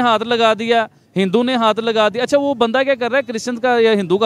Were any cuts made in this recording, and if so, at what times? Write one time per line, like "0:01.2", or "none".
none